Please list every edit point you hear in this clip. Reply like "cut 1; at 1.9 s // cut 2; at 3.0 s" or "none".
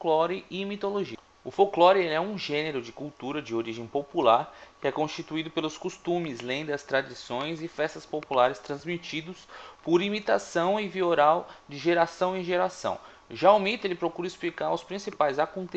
cut 1; at 9.8 s